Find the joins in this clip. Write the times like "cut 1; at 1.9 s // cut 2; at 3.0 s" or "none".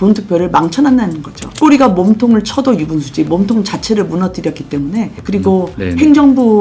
cut 1; at 5.1 s